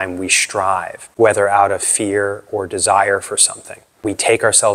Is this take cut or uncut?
cut